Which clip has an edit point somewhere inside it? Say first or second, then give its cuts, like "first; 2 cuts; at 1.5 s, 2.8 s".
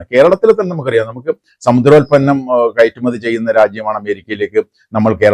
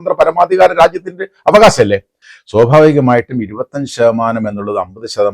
second; 1 cut; at 2.2 s